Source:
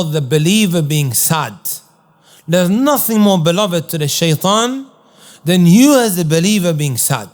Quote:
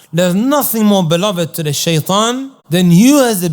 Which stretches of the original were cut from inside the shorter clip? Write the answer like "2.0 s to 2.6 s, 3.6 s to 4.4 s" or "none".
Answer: 4.9 s to 5.3 s